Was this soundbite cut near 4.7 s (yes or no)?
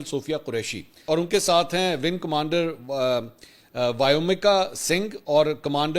no